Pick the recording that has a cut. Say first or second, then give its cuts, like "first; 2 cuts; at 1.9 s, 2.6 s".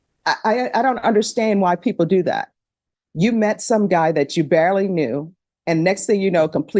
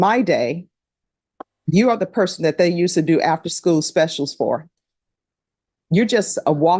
second; 1 cut; at 3.3 s